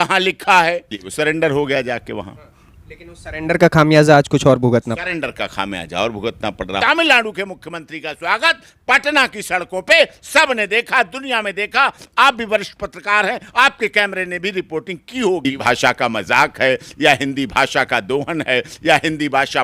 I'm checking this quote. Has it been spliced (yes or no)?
yes